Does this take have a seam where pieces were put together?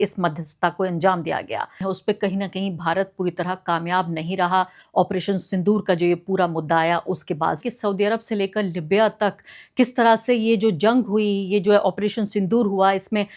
yes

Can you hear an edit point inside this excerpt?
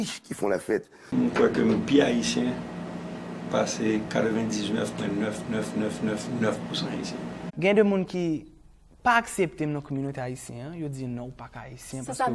yes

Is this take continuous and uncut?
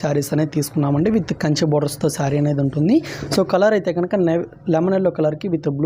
yes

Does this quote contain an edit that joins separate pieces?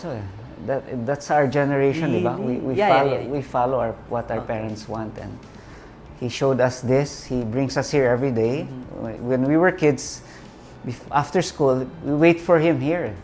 no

